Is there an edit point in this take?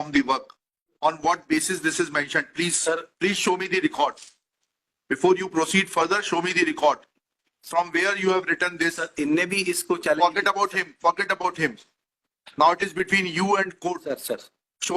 yes; 1 cut; at 0.9 s

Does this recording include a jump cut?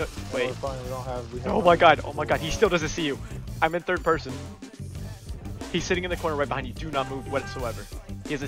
no; 0 cuts

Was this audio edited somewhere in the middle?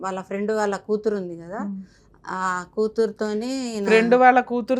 no; 0 cuts

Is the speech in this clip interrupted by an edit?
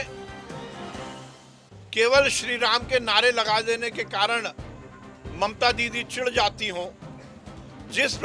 no; 0 cuts

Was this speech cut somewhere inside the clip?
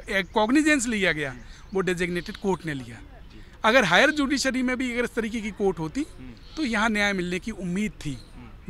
no; 0 cuts

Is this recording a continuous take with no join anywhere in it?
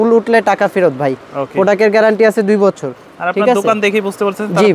yes; 0 cuts

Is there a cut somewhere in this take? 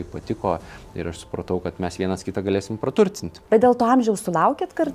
yes; 1 cut; at 3.3 s

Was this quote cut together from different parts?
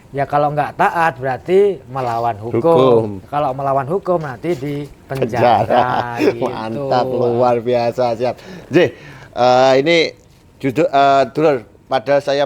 no; 0 cuts

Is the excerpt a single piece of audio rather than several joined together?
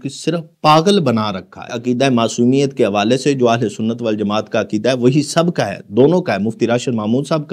no; 1 cut; at 1.8 s

